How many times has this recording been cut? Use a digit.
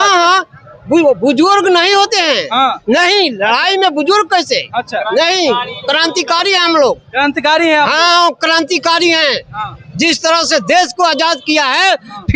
0